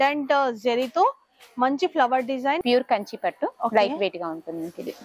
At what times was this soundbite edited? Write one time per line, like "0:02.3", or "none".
0:02.6